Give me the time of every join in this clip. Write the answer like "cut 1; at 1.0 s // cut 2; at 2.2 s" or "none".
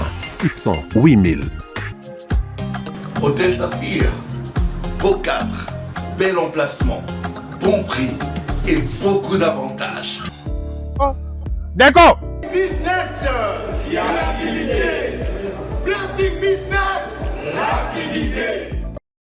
cut 1; at 12.3 s